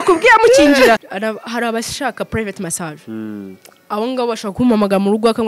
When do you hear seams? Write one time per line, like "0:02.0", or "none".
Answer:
0:01.0